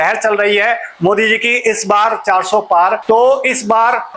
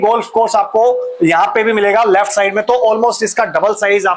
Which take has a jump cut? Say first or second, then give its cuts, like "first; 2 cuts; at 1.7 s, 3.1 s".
first; 1 cut; at 3.0 s